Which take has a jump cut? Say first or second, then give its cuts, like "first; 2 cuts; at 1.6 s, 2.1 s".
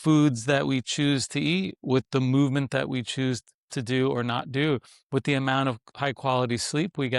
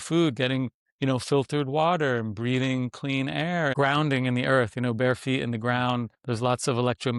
second; 2 cuts; at 3.7 s, 6.2 s